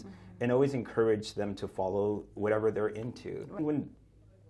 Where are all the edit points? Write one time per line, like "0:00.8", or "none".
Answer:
0:03.6